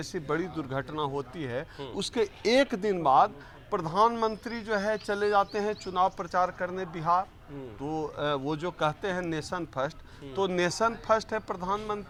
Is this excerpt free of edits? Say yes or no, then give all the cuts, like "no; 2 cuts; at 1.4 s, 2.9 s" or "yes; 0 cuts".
yes; 0 cuts